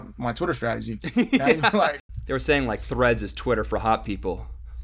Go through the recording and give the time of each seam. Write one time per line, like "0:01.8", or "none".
0:02.0